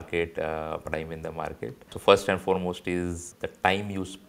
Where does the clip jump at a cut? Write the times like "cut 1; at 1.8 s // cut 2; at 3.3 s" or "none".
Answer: cut 1; at 2.0 s // cut 2; at 3.2 s